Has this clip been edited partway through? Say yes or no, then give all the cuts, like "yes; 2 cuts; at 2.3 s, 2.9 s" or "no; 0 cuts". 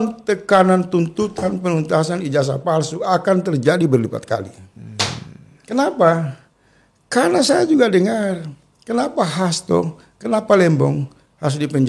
no; 0 cuts